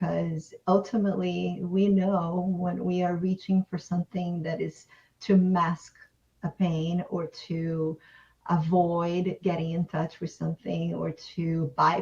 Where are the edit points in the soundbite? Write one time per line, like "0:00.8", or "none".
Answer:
none